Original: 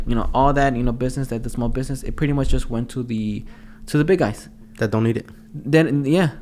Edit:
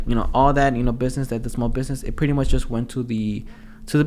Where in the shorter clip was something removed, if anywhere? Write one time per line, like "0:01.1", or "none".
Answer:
none

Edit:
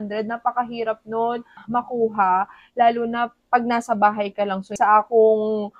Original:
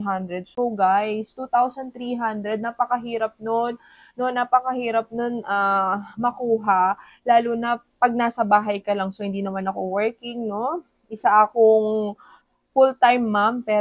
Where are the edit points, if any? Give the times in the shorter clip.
0:01.6
0:04.7

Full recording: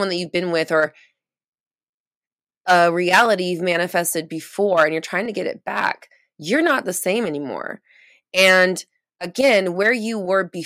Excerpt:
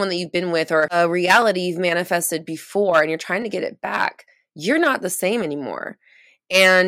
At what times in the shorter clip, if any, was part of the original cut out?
0:00.9

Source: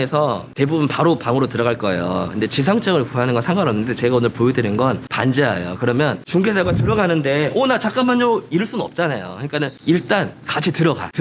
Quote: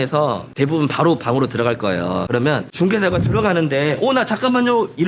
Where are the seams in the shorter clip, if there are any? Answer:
0:02.3

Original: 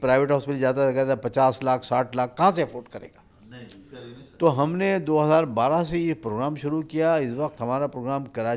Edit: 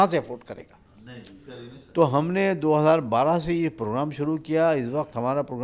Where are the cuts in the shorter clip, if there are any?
none

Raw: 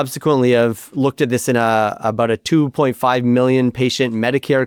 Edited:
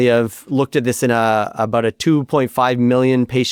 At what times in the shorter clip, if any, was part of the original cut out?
none

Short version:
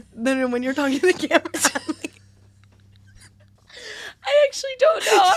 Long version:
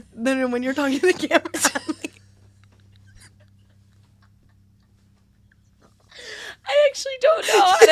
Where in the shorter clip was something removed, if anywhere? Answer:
0:03.5

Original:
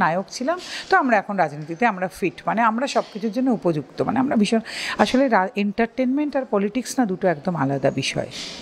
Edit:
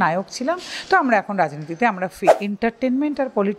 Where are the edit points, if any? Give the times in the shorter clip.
0:02.4

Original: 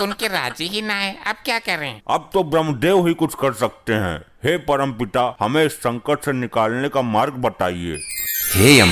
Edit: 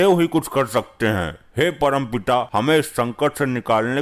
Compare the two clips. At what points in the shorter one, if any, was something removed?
none

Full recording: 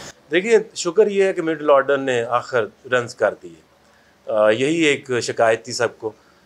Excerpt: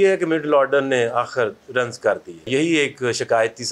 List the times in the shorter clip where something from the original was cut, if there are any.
0:02.5

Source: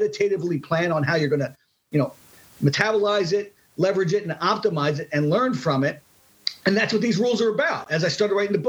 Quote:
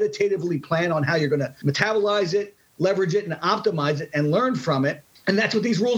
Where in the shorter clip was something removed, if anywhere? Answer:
0:01.5
0:05.1

